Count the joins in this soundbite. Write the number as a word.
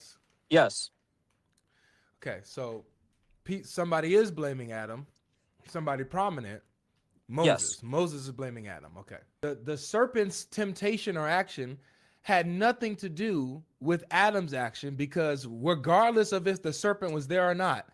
one